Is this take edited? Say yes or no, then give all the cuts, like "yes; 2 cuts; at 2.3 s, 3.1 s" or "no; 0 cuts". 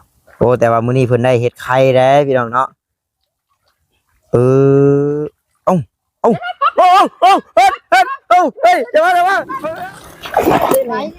yes; 1 cut; at 9.5 s